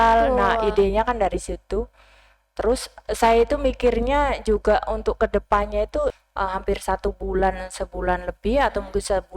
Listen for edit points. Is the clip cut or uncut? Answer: cut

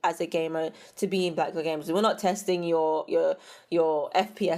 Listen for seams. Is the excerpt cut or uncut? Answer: uncut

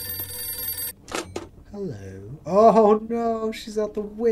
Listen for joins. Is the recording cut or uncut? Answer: uncut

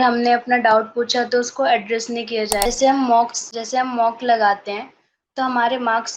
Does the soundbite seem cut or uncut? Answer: cut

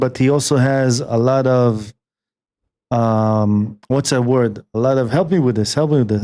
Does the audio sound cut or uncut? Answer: uncut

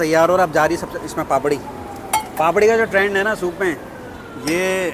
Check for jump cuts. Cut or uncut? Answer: uncut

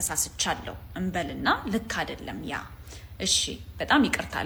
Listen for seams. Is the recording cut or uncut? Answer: uncut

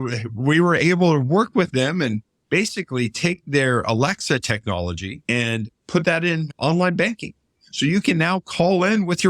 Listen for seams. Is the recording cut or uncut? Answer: cut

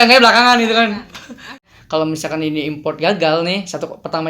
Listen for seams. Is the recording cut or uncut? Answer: cut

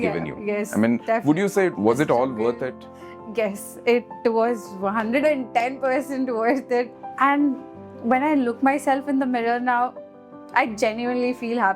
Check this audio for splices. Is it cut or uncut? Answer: cut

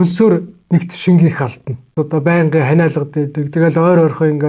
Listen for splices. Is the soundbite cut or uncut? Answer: cut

